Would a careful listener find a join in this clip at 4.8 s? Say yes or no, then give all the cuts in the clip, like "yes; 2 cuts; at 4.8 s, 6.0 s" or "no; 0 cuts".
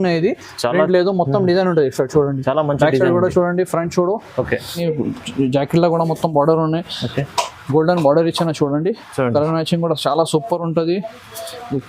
yes; 1 cut; at 4.8 s